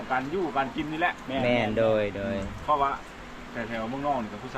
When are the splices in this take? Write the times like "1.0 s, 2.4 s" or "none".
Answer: none